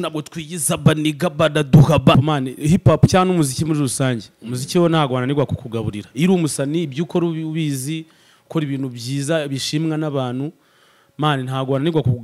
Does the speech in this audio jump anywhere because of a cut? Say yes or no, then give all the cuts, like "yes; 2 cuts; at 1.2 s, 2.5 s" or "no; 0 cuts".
yes; 1 cut; at 2.1 s